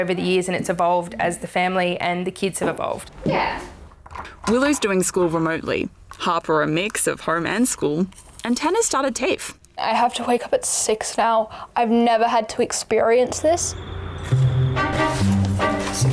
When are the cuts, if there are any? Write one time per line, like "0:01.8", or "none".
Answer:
none